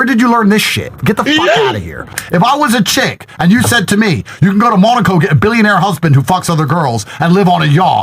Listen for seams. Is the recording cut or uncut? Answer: cut